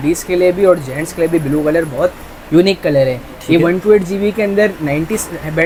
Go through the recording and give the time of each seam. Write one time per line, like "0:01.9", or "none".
none